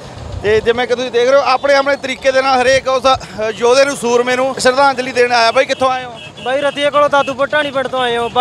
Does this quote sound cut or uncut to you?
cut